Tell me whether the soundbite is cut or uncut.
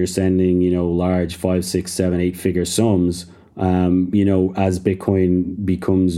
uncut